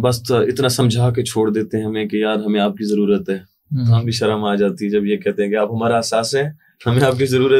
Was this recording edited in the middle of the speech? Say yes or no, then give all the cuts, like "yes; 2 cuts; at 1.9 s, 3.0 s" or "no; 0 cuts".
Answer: no; 0 cuts